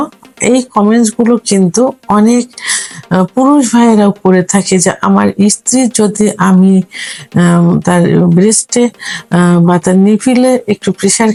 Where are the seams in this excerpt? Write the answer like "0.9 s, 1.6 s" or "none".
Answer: none